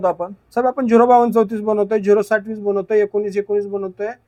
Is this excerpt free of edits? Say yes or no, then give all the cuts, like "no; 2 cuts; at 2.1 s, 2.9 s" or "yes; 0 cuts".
yes; 0 cuts